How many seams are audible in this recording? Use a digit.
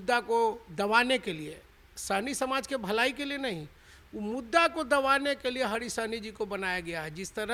0